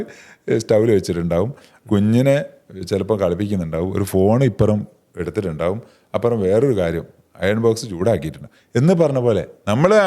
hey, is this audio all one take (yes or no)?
yes